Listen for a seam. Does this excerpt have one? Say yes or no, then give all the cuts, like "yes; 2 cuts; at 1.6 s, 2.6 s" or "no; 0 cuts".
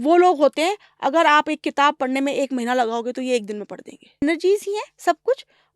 yes; 1 cut; at 4.2 s